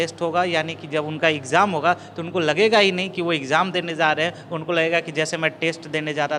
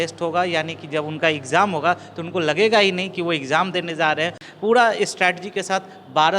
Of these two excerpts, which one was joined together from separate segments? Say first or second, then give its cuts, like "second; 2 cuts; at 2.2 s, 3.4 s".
second; 1 cut; at 4.4 s